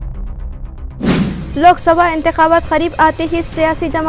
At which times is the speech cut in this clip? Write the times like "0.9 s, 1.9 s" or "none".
1.4 s